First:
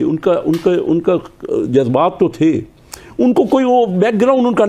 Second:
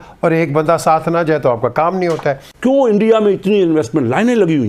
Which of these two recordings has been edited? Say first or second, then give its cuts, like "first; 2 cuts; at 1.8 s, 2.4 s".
second; 1 cut; at 2.5 s